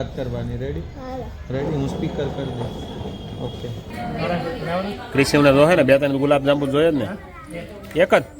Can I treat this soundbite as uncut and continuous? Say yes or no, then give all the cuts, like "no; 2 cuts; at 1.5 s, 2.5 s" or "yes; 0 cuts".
no; 1 cut; at 3.9 s